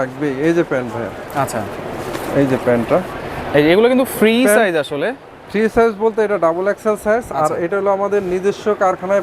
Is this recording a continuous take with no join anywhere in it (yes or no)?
yes